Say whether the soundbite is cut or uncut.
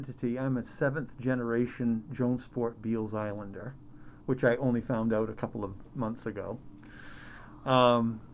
uncut